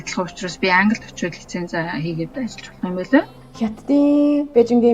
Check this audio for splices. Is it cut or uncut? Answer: cut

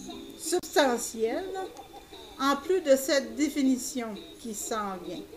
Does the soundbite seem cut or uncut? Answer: cut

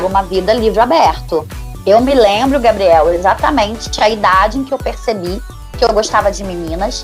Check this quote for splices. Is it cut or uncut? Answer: cut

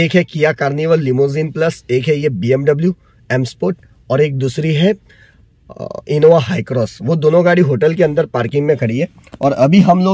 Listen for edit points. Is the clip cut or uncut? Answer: uncut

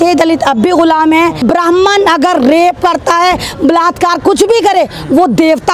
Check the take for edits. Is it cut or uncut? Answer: cut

